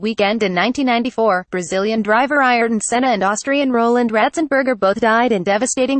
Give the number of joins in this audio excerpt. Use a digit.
1